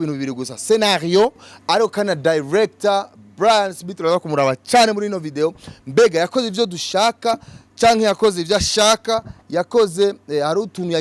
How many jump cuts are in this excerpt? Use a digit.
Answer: 1